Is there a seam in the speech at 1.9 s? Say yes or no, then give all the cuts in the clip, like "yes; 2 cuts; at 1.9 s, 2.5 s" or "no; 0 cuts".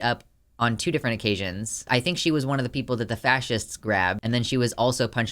yes; 1 cut; at 1.9 s